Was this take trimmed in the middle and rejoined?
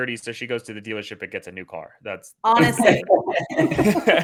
no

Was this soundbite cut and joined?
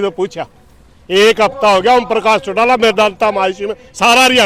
no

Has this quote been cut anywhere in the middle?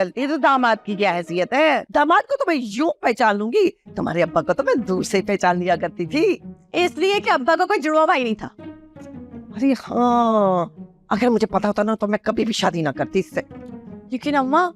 no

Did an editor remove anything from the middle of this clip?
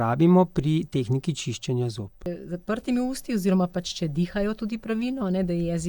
yes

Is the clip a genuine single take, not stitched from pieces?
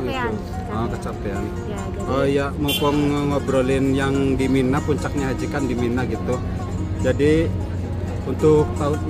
yes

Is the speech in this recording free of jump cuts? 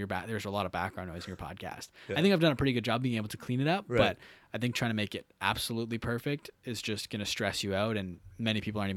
yes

